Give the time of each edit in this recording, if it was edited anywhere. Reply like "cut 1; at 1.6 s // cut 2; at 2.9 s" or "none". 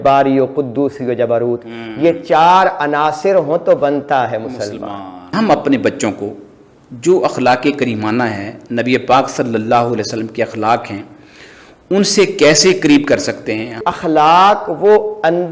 cut 1; at 5.3 s // cut 2; at 13.7 s